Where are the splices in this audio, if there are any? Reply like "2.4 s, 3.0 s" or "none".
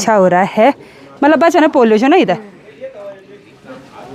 none